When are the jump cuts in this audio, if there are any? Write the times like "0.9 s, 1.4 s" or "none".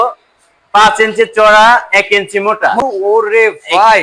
2.8 s